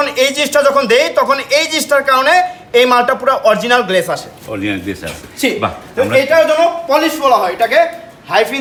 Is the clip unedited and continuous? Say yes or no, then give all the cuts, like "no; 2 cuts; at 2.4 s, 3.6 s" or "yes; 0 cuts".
yes; 0 cuts